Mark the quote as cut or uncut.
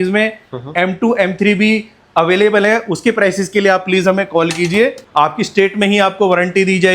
cut